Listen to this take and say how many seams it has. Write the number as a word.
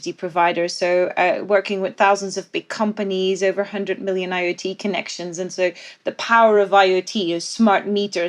zero